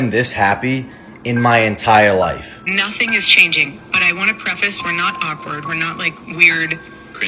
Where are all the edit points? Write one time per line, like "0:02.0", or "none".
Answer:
none